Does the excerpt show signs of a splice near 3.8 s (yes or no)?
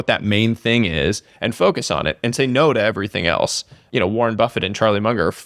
yes